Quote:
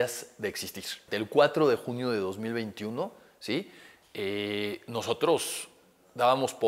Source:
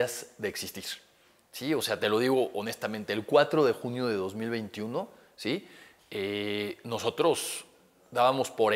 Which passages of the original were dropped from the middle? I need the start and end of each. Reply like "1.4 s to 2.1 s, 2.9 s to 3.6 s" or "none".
1.0 s to 3.0 s